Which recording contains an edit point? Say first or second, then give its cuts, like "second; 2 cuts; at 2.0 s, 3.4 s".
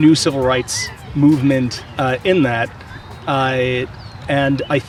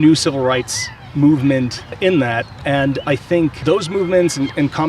second; 3 cuts; at 1.9 s, 2.5 s, 3.6 s